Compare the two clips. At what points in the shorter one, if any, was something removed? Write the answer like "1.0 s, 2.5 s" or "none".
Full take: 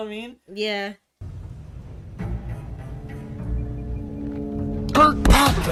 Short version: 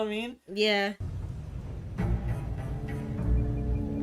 1.1 s